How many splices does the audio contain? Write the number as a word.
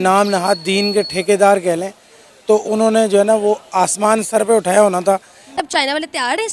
one